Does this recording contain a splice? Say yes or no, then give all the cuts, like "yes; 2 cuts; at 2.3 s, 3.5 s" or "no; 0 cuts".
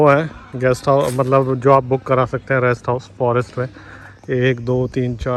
no; 0 cuts